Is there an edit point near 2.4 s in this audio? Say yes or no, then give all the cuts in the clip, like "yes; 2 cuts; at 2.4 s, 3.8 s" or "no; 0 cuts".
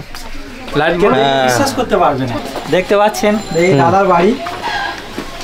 yes; 1 cut; at 2.4 s